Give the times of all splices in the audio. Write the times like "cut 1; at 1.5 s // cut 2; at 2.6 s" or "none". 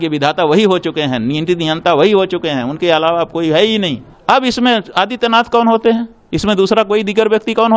cut 1; at 4.1 s